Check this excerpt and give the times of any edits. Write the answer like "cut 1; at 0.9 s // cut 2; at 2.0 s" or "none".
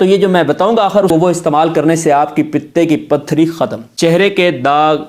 cut 1; at 1.1 s // cut 2; at 3.8 s